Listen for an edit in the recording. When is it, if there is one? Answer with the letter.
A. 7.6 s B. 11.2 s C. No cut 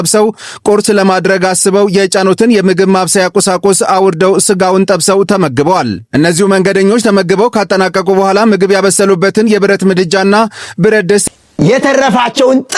B